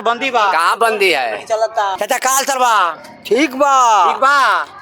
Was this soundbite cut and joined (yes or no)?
yes